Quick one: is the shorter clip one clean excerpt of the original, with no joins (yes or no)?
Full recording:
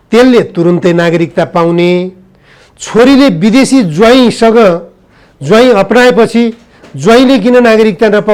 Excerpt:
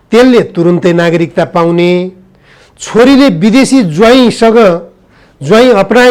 yes